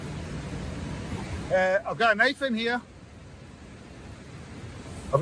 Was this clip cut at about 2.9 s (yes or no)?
no